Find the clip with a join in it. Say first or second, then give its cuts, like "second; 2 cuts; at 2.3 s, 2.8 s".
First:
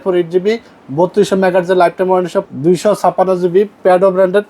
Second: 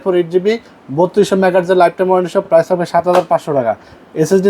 first; 1 cut; at 2.5 s